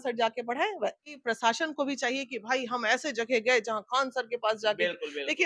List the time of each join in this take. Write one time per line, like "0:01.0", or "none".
0:01.2